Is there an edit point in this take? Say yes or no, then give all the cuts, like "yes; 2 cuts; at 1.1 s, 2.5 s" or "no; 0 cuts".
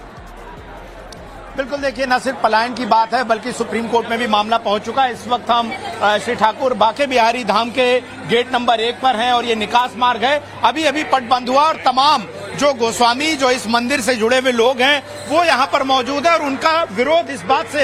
no; 0 cuts